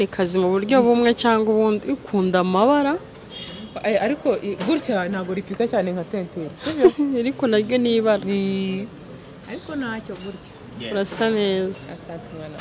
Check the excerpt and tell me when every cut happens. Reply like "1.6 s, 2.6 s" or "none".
none